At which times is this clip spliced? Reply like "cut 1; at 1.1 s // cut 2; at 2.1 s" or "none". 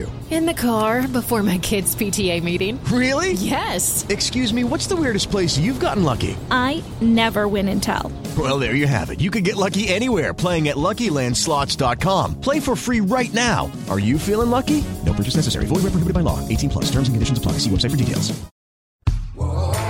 cut 1; at 19.0 s